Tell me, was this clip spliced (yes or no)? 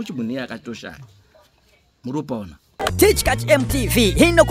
yes